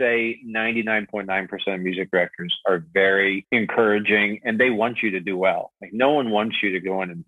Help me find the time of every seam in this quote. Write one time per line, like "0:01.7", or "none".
0:03.4